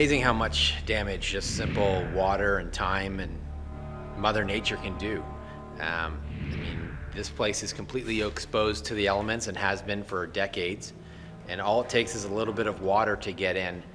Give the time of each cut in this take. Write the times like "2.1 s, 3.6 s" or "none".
none